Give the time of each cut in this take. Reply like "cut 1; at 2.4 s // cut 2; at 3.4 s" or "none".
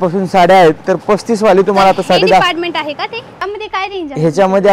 cut 1; at 3.4 s